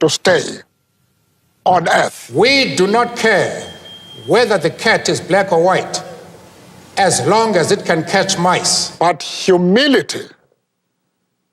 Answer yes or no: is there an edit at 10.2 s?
no